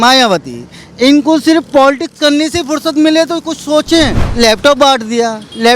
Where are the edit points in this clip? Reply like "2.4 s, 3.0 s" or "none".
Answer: 4.2 s